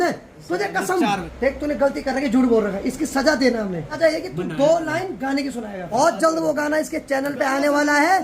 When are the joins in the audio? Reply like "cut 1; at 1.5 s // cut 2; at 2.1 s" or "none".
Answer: cut 1; at 1.3 s // cut 2; at 4.0 s // cut 3; at 5.9 s